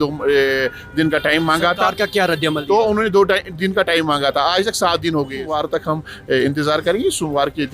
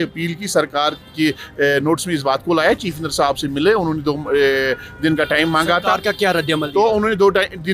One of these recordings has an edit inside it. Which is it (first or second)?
first